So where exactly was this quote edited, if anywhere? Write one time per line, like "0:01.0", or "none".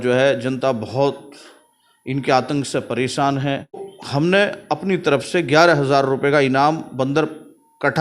0:03.9